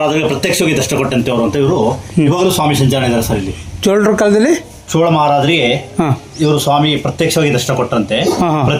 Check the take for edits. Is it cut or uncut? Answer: uncut